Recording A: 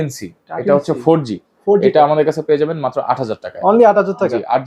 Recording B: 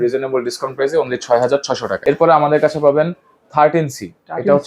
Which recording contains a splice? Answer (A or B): B